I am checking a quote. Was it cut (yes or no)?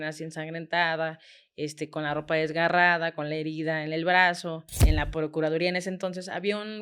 yes